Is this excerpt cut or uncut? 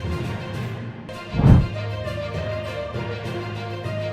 cut